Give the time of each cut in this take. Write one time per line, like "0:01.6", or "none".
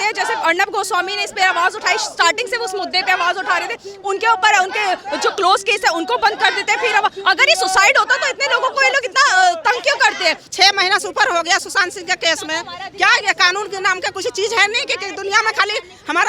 0:10.5